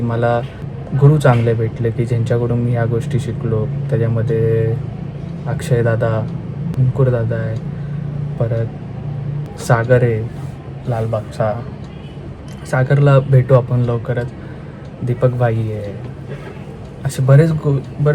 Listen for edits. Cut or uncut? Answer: cut